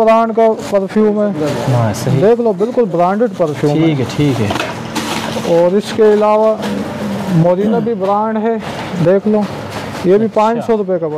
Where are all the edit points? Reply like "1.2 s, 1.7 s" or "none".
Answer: none